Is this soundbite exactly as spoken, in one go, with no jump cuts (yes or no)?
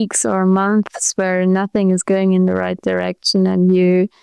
yes